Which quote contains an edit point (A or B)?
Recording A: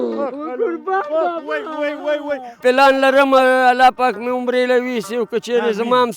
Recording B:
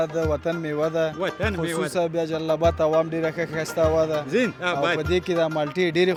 A